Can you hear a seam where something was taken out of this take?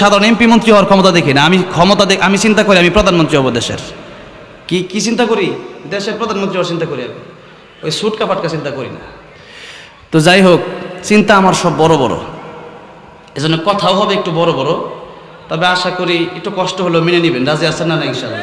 no; 0 cuts

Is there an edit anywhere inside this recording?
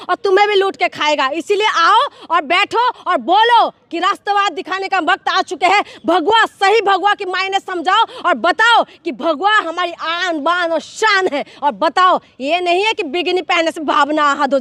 no; 0 cuts

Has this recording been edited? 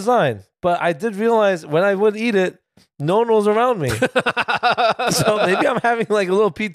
no; 0 cuts

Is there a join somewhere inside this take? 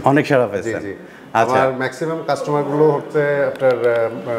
no; 0 cuts

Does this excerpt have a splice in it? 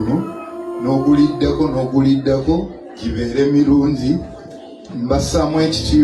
no; 0 cuts

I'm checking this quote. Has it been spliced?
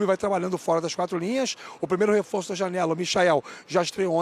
no; 0 cuts

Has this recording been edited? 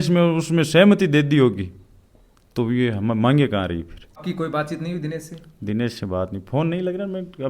yes; 1 cut; at 4.2 s

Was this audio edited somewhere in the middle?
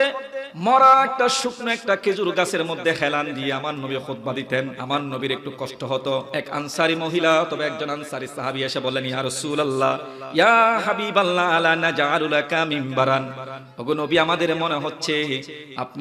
yes; 2 cuts; at 4.8 s, 6.3 s

